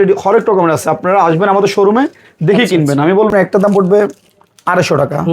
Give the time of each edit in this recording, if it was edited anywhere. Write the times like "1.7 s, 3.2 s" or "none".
3.3 s

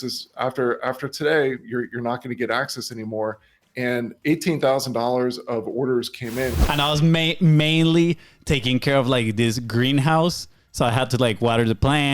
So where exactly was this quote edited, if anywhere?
6.6 s

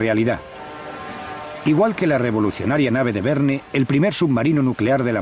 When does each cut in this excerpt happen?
2.4 s

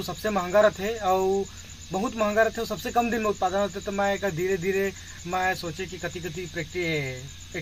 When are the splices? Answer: none

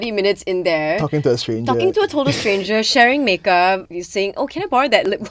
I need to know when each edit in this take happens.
3.9 s

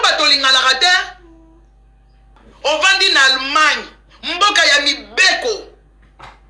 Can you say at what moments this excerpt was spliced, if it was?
2.4 s

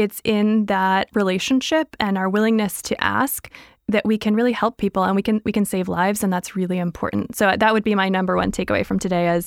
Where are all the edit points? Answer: 1.1 s

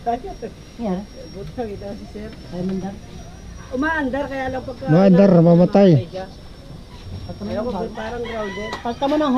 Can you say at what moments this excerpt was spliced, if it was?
none

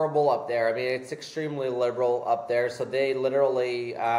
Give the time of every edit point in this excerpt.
none

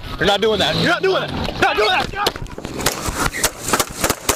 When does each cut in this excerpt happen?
none

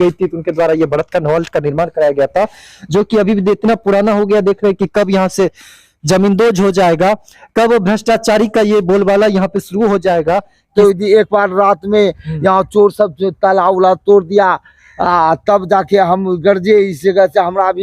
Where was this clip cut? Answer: 10.7 s

